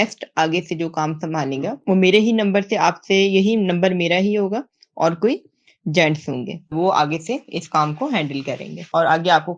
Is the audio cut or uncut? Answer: cut